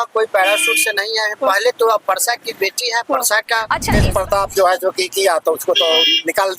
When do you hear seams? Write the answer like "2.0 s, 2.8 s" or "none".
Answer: 3.9 s